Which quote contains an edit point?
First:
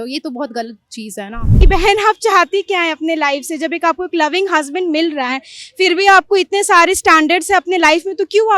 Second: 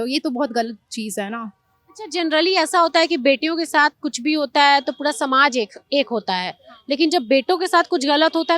first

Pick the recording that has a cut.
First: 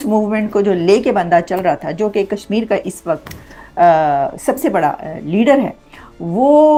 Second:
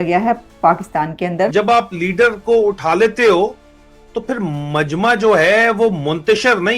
second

